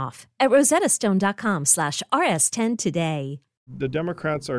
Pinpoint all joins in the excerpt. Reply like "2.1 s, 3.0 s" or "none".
3.7 s